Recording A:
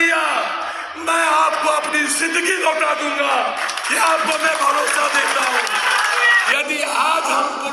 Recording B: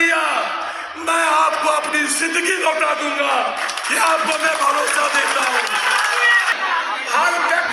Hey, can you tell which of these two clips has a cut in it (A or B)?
A